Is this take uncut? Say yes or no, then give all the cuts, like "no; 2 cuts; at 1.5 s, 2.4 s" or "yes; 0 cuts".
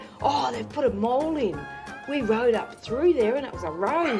yes; 0 cuts